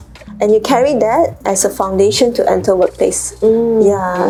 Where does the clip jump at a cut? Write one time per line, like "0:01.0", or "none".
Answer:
none

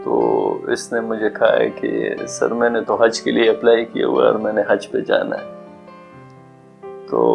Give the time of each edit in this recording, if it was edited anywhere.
none

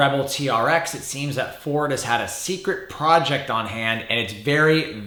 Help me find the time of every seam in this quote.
none

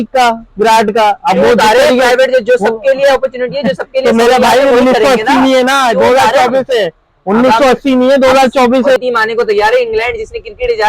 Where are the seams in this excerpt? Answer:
0:09.0

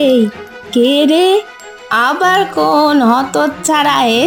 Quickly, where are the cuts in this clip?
none

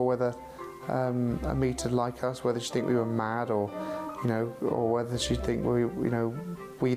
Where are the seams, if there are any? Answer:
none

